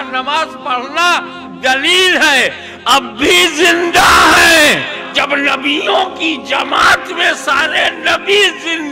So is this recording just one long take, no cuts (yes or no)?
no